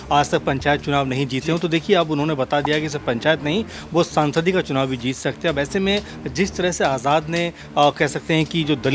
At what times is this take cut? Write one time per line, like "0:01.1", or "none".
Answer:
none